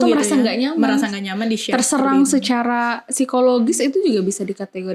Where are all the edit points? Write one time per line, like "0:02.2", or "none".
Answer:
none